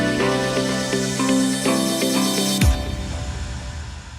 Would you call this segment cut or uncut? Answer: cut